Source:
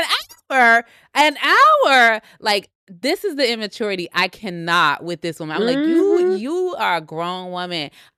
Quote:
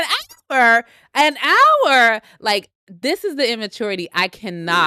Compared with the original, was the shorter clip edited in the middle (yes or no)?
no